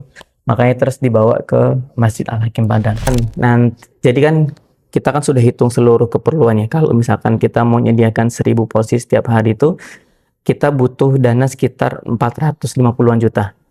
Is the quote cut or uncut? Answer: cut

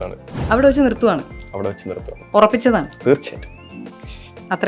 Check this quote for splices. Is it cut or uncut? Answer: cut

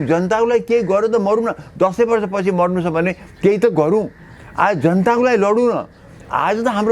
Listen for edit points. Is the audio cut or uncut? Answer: uncut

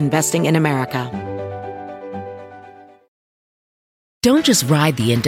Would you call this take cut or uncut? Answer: cut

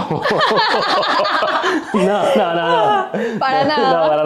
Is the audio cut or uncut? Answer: uncut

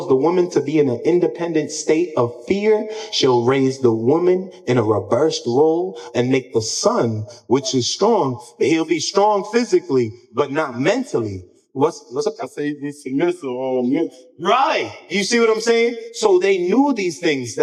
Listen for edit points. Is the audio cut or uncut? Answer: uncut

